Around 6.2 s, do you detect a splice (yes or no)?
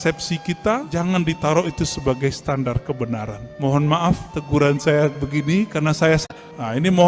yes